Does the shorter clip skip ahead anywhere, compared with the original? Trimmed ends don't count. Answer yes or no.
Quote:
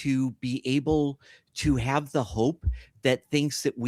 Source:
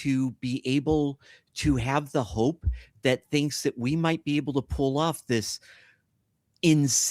no